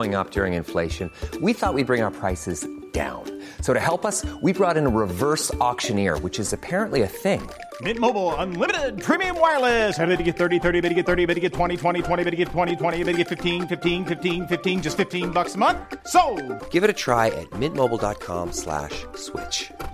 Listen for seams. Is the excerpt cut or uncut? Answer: uncut